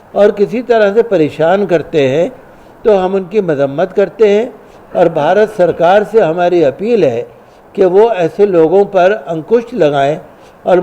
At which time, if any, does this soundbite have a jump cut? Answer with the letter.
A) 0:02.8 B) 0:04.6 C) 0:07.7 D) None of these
D